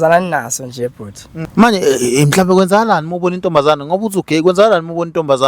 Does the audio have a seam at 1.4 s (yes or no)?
yes